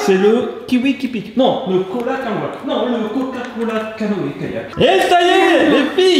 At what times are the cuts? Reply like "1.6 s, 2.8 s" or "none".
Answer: 4.7 s